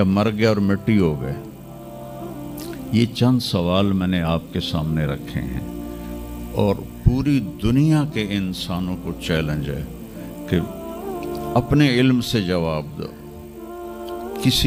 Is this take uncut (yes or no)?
yes